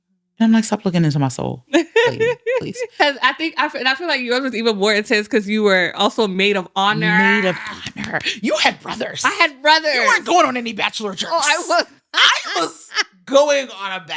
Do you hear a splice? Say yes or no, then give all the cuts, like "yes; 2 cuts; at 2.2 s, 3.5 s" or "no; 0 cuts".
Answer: yes; 1 cut; at 2.9 s